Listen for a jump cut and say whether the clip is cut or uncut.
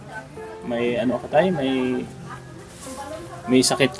uncut